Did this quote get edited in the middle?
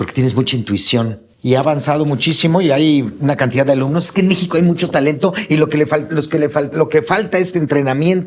yes; 1 cut; at 1.3 s

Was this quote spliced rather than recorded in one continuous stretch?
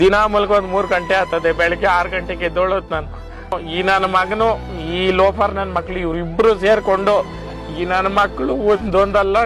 no; 0 cuts

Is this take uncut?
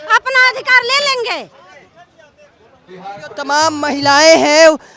yes; 0 cuts

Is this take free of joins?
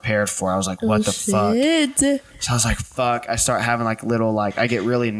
yes; 0 cuts

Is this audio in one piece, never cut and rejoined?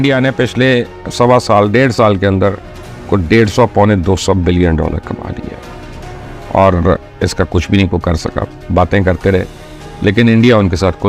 yes; 0 cuts

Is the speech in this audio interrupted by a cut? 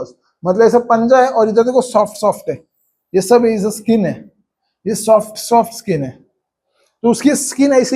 no; 0 cuts

